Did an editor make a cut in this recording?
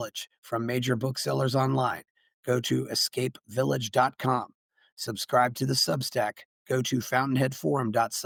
no; 0 cuts

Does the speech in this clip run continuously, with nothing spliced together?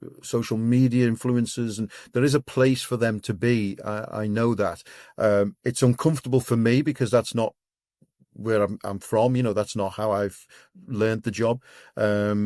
yes; 0 cuts

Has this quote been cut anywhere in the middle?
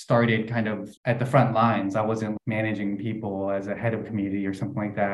yes; 2 cuts; at 0.9 s, 2.4 s

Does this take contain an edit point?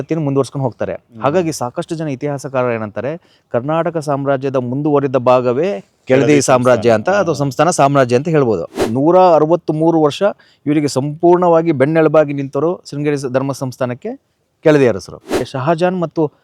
yes; 2 cuts; at 8.8 s, 15.5 s

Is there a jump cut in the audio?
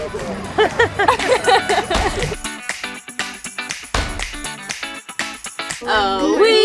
no; 0 cuts

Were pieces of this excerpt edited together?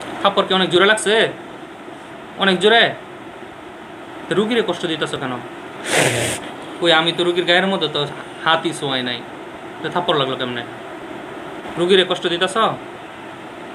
yes; 1 cut; at 11.6 s

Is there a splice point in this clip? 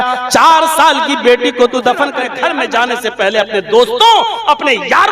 yes; 1 cut; at 2.2 s

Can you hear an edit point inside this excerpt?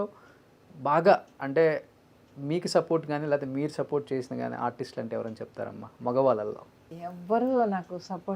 yes; 1 cut; at 6.9 s

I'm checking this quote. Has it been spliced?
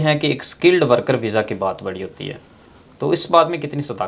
no; 0 cuts

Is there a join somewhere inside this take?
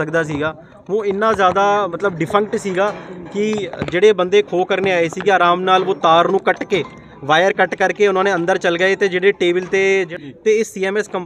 yes; 1 cut; at 10.1 s

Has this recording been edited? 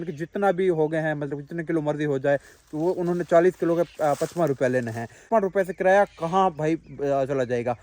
yes; 1 cut; at 5.1 s

